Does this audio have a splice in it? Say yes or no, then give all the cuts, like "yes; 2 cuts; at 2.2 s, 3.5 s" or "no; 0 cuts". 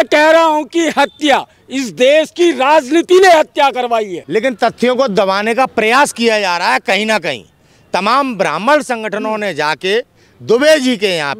yes; 1 cut; at 4.1 s